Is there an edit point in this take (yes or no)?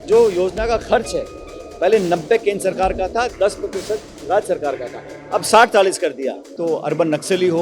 yes